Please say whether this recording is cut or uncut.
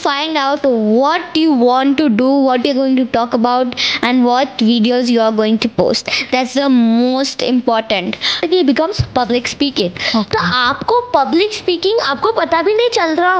cut